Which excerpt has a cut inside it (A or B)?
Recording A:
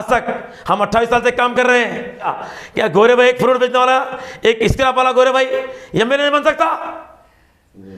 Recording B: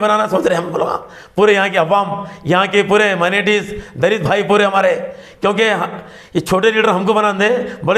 A